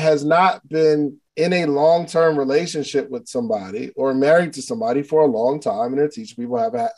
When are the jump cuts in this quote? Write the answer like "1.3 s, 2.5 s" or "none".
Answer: 1.2 s